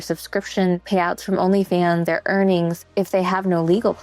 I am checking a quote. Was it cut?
yes; 3 cuts; at 0.8 s, 2.0 s, 2.9 s

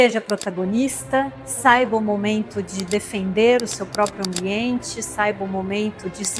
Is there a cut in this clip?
no; 0 cuts

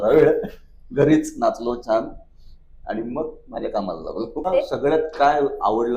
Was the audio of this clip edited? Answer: yes; 1 cut; at 4.5 s

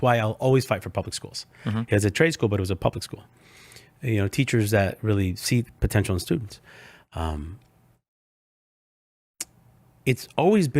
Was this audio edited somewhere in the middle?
no; 0 cuts

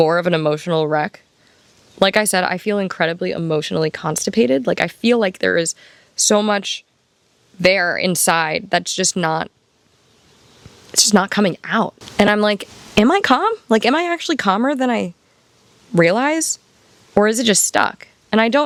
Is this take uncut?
yes; 0 cuts

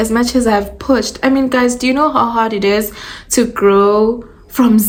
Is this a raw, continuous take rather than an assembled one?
yes; 0 cuts

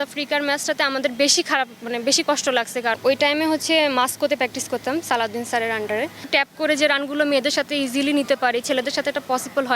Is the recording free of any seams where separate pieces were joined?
no; 2 cuts; at 3.0 s, 6.2 s

